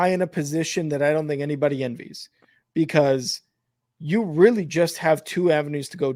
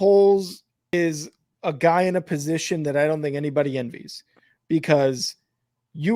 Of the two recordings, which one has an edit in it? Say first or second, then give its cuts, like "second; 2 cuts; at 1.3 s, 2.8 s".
second; 1 cut; at 0.9 s